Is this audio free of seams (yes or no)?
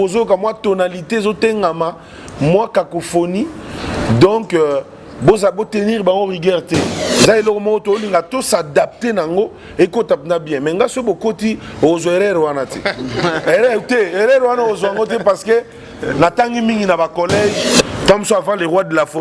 no